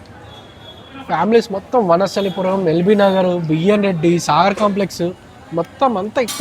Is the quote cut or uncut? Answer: uncut